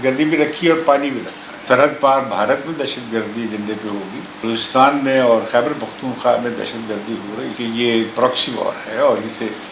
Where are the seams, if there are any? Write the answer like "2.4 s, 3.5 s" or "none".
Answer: 1.6 s, 4.4 s, 7.5 s